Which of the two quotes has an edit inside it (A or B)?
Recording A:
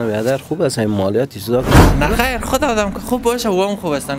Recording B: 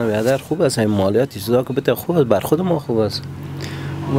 A